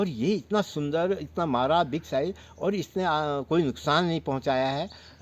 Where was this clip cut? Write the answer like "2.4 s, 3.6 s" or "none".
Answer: none